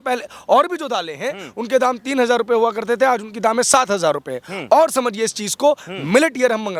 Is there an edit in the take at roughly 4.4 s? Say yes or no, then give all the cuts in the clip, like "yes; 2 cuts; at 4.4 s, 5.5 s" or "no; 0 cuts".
no; 0 cuts